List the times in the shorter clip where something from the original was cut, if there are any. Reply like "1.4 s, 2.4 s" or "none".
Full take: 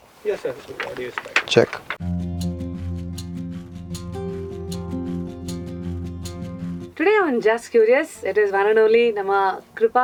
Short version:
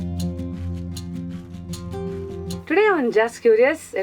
2.6 s